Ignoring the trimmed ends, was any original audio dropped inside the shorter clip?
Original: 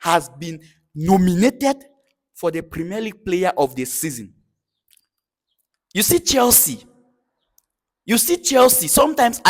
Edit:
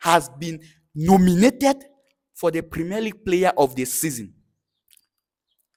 no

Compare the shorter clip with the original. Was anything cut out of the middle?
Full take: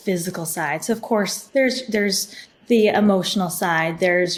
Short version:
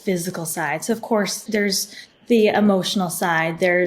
yes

